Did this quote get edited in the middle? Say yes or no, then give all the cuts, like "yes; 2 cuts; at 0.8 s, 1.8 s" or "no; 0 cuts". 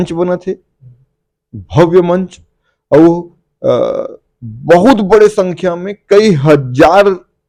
no; 0 cuts